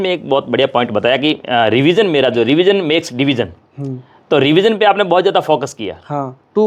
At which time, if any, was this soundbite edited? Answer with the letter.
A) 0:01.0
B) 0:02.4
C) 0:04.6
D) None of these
D